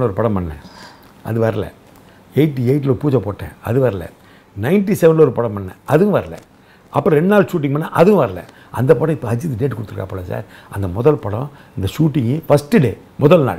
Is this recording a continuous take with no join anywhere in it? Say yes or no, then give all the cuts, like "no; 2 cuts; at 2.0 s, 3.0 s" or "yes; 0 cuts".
yes; 0 cuts